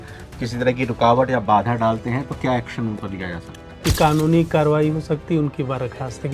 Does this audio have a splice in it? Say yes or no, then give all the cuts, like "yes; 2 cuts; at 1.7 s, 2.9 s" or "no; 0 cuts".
yes; 1 cut; at 3.6 s